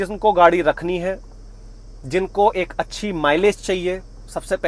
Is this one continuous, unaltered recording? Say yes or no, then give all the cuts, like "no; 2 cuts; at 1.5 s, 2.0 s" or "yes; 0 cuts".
yes; 0 cuts